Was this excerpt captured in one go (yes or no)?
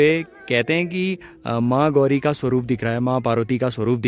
yes